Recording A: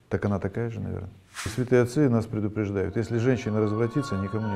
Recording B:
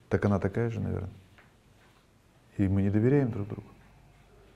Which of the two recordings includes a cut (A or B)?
A